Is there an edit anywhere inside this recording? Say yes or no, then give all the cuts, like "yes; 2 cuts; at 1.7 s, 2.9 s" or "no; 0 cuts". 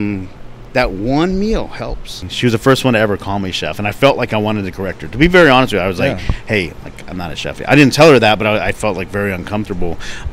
yes; 1 cut; at 2.2 s